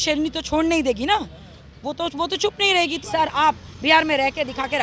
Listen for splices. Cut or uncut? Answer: cut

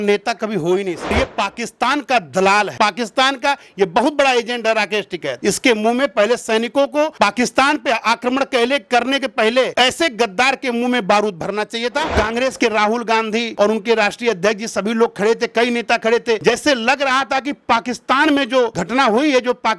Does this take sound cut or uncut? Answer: cut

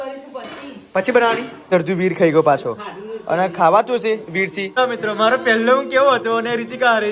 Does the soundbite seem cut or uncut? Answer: cut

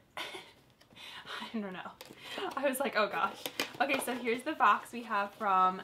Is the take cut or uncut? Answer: uncut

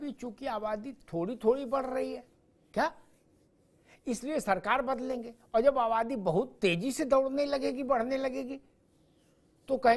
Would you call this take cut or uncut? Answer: uncut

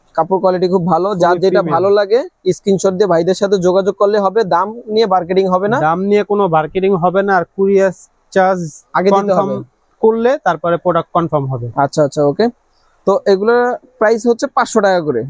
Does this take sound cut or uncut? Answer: uncut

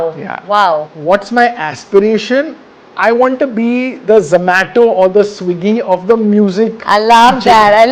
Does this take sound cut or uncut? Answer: cut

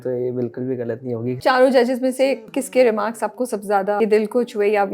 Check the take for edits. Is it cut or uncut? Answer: cut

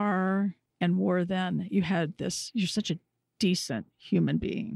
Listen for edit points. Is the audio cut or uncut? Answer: cut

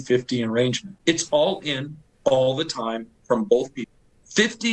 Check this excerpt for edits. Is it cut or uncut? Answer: cut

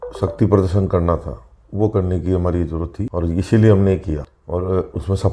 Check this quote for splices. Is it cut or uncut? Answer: cut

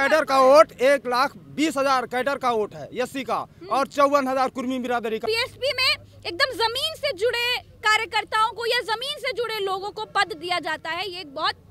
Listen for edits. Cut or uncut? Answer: cut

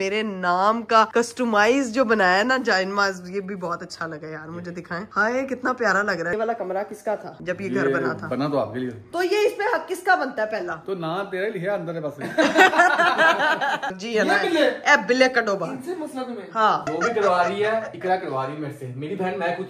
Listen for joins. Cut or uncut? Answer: cut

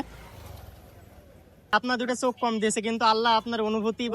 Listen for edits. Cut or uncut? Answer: cut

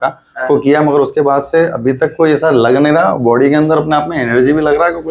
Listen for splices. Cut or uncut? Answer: uncut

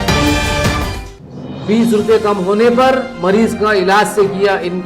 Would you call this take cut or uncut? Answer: cut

